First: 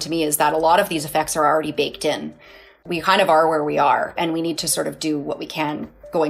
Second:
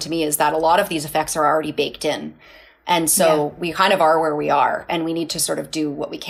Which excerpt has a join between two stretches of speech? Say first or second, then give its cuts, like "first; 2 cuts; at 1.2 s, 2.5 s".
first; 1 cut; at 2.8 s